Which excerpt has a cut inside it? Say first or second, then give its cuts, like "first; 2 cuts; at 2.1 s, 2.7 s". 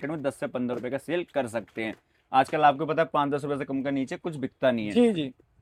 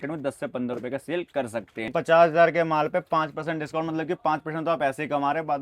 second; 1 cut; at 1.9 s